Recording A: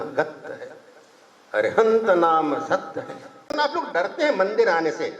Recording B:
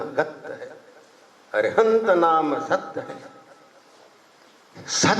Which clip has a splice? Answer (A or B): A